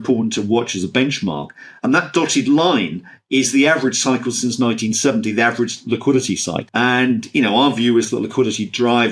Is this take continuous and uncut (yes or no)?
no